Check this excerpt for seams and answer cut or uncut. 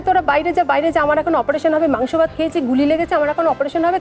uncut